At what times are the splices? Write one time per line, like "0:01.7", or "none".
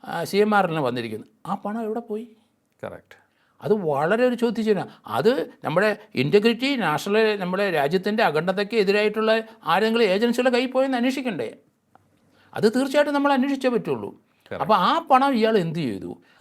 none